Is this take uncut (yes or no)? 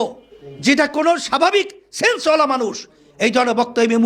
yes